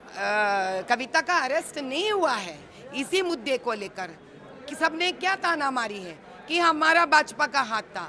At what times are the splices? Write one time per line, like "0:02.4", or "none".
none